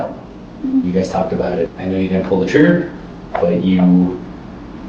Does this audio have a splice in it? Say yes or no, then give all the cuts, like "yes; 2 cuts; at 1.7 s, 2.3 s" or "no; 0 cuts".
yes; 1 cut; at 1.7 s